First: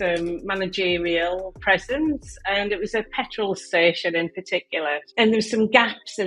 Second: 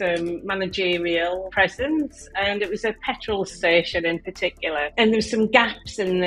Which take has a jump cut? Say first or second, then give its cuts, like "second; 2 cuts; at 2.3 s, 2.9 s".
second; 2 cuts; at 1.5 s, 4.9 s